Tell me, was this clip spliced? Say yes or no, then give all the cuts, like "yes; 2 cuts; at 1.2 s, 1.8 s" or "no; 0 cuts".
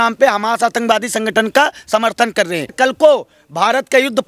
yes; 1 cut; at 2.7 s